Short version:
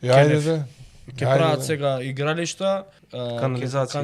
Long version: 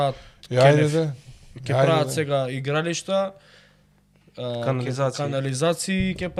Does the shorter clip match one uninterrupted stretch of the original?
no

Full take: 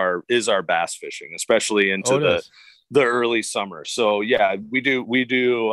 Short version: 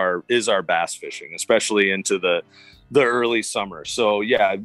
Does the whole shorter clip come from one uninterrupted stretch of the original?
yes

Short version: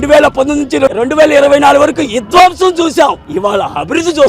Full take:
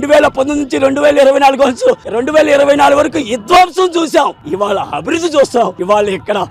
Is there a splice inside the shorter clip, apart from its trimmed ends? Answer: yes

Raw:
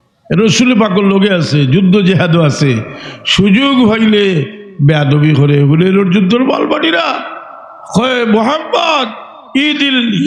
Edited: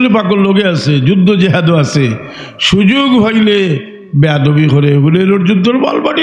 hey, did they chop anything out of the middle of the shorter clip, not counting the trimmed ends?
no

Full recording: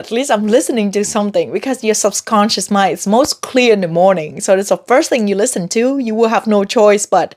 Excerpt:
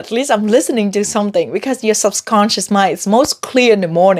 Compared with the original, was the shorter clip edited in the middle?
no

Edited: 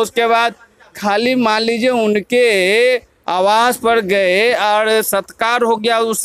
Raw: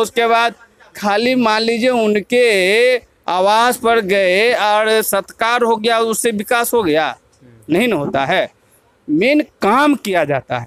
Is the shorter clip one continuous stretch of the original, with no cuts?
yes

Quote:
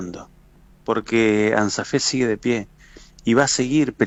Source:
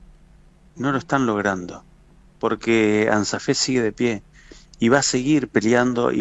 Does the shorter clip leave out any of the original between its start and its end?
no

